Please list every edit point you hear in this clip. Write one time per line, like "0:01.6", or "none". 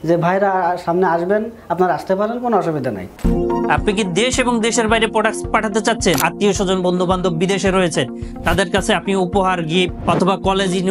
none